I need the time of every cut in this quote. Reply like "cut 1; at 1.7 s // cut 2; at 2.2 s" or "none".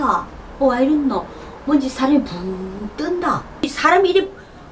cut 1; at 3.7 s